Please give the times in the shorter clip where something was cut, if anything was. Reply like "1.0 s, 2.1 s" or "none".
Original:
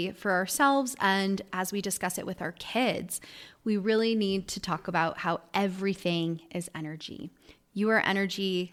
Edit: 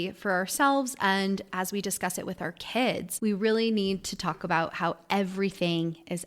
3.1 s